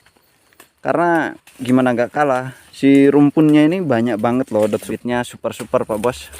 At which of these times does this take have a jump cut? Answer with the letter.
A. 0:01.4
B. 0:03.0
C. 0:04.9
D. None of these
C